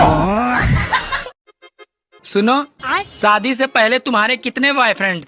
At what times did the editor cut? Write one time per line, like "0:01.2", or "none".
0:01.2